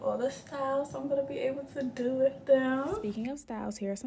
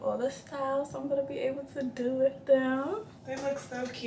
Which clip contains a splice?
second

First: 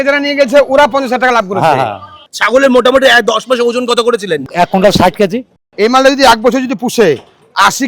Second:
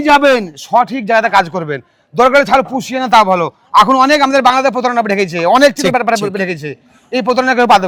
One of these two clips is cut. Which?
first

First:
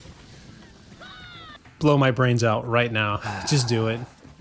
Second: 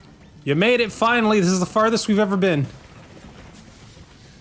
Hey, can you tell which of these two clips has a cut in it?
first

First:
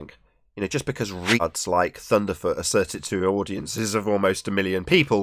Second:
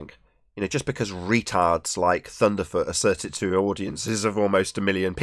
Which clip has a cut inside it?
first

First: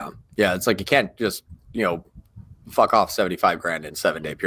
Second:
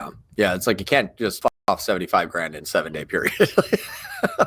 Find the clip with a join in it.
second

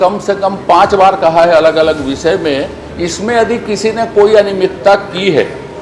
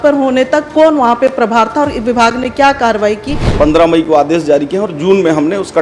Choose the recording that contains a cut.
second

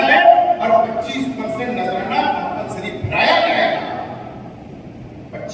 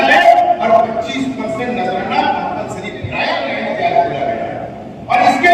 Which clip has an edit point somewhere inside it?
second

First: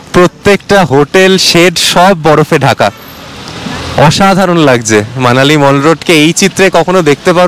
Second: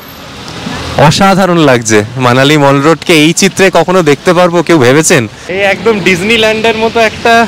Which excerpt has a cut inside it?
second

